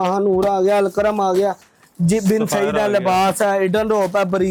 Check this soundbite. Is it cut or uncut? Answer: uncut